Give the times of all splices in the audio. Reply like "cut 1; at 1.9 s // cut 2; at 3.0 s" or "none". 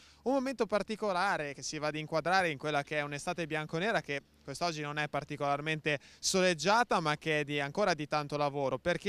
cut 1; at 1.1 s